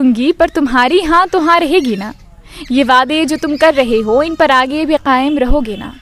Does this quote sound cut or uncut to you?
uncut